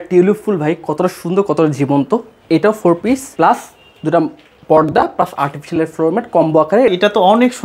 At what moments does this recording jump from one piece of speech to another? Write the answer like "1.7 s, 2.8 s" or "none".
3.3 s, 6.9 s